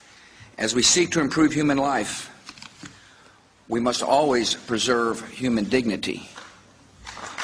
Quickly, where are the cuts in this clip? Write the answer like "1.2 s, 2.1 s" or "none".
none